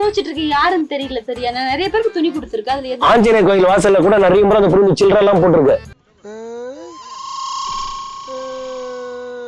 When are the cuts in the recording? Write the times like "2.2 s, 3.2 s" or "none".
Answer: none